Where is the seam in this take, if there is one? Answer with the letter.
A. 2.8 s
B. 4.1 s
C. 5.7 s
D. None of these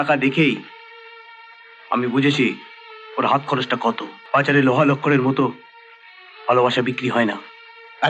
B